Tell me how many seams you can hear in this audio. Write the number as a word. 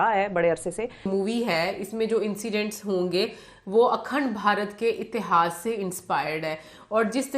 one